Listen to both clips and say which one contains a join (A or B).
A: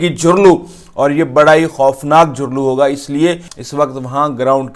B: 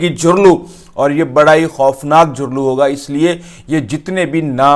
A